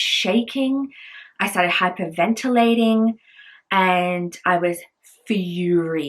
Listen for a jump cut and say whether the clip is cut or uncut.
uncut